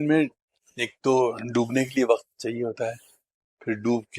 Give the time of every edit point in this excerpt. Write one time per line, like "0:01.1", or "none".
none